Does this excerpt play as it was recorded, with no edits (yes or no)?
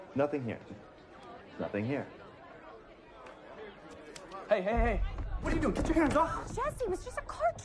no